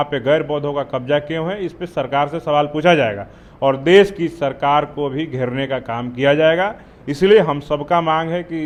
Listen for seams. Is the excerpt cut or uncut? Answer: uncut